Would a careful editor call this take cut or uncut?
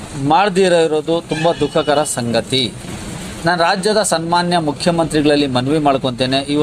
uncut